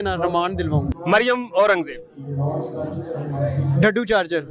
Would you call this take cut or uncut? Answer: cut